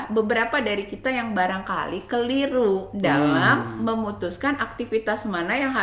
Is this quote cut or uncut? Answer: uncut